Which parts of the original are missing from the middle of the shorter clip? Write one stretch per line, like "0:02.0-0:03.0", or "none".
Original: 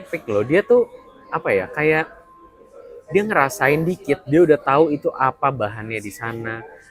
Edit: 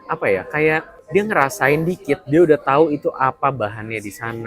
0:02.2-0:03.0